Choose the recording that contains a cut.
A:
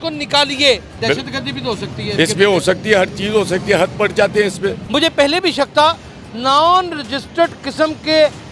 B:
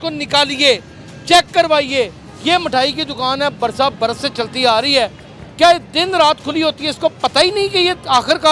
A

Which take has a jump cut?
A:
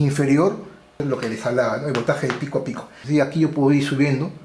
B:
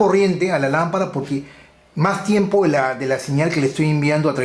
A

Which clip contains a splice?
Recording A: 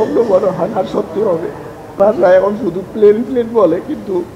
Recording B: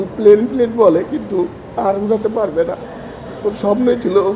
A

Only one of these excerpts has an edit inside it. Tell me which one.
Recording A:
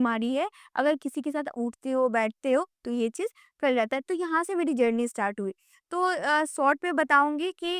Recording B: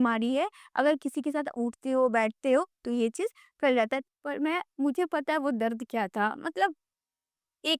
B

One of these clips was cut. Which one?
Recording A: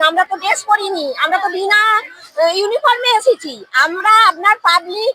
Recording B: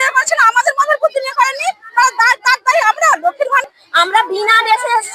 B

